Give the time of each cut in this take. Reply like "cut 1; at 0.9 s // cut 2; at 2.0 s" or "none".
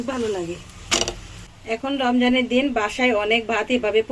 cut 1; at 1.7 s